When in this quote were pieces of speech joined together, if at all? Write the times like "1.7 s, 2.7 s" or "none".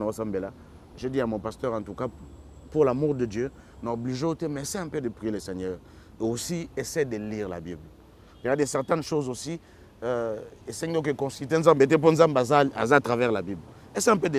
none